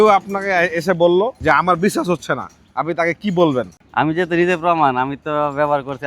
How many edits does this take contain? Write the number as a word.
one